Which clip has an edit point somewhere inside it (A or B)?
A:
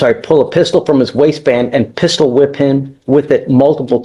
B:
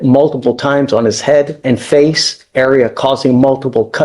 B